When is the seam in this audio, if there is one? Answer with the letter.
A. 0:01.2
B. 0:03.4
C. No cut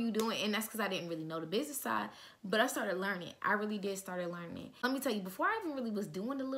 C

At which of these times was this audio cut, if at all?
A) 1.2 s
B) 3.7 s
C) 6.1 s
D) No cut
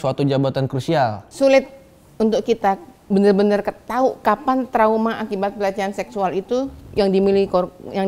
A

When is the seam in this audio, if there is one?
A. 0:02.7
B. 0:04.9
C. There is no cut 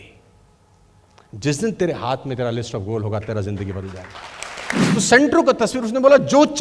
B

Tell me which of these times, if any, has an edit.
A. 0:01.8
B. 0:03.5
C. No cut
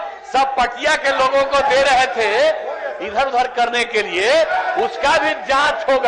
C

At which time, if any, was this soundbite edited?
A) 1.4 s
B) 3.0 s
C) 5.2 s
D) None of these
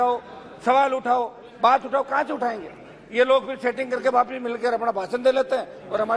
D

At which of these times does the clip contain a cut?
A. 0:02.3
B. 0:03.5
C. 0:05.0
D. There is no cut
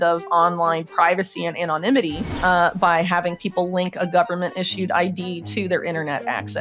A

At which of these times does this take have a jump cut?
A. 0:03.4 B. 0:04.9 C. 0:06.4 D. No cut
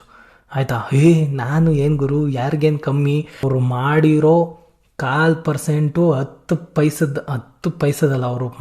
A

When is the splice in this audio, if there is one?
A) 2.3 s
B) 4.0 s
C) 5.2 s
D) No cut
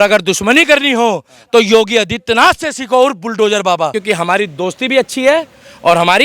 B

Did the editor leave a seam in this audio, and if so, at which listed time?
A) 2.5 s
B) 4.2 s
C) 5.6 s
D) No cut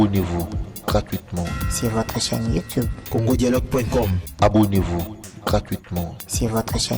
B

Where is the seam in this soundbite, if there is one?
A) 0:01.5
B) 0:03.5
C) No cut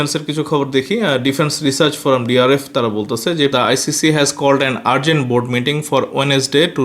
B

